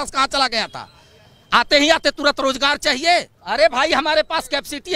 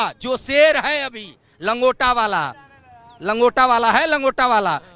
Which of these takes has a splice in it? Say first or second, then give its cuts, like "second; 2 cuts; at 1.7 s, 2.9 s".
first; 1 cut; at 3.4 s